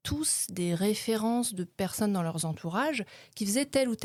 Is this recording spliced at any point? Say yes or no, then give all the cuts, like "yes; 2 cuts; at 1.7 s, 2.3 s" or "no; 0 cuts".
no; 0 cuts